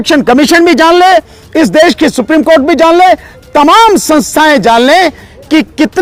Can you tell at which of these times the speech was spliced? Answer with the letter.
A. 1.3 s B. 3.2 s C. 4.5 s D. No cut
D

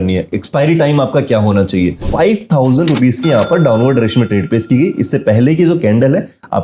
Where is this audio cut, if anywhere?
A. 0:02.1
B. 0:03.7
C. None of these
A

